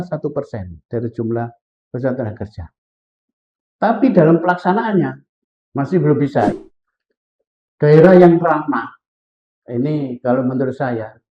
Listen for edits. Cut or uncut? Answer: cut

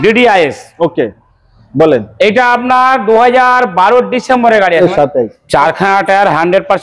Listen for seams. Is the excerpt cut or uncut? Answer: cut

